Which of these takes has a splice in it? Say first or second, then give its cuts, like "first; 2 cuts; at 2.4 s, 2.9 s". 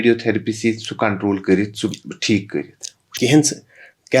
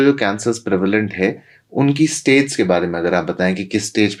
first; 1 cut; at 3.1 s